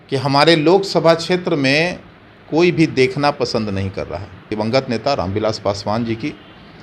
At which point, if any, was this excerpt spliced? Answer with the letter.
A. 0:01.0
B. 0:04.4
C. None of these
B